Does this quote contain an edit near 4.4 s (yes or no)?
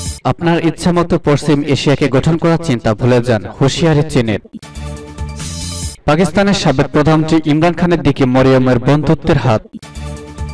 yes